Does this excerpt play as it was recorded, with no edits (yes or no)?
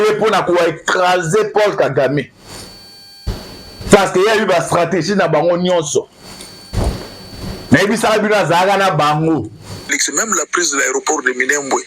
no